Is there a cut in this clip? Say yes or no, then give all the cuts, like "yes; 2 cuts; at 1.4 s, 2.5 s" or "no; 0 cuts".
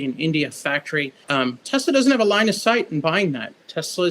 yes; 1 cut; at 1.2 s